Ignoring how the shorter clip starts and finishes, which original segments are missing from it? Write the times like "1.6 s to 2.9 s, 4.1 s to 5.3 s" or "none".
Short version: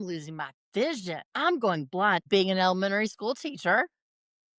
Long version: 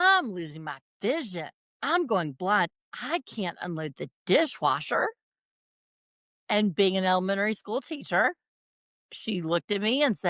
1.5 s to 1.7 s, 2.7 s to 6.7 s